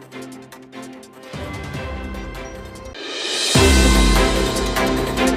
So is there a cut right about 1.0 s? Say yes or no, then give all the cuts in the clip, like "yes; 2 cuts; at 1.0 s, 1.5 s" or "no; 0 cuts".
no; 0 cuts